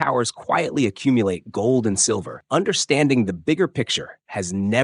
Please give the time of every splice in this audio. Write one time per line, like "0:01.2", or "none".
0:02.3